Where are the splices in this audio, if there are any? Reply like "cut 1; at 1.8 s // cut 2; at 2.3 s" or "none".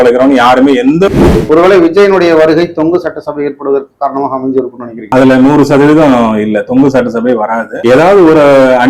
cut 1; at 1.1 s